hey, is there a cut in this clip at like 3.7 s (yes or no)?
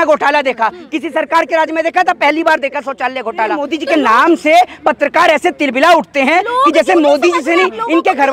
yes